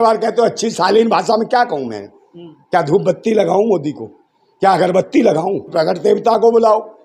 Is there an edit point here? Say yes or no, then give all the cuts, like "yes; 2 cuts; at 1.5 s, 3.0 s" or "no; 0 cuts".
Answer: yes; 1 cut; at 5.7 s